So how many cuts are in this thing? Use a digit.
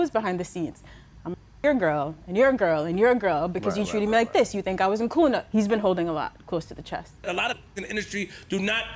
1